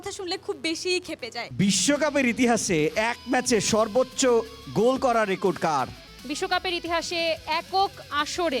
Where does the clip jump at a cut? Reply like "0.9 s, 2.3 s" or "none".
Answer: 1.4 s, 6.1 s